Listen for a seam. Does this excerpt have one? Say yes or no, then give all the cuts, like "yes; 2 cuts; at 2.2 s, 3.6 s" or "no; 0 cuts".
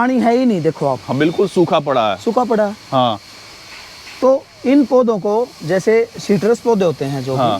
no; 0 cuts